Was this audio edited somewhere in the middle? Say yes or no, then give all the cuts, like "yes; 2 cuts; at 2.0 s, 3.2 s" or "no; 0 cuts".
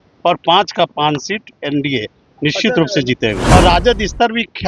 yes; 1 cut; at 3.4 s